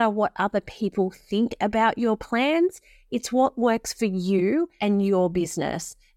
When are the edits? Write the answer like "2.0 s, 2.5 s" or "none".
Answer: 4.7 s

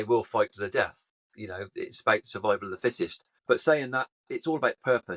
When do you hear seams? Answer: 3.3 s

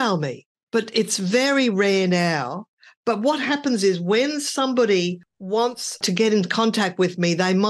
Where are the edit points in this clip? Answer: 5.9 s

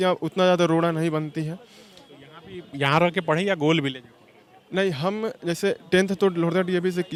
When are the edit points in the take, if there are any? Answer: none

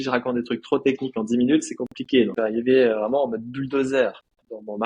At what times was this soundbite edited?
2.3 s

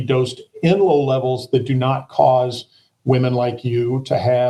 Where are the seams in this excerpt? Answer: none

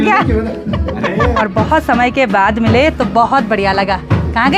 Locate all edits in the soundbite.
1.4 s

